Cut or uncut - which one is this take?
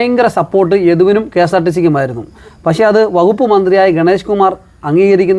uncut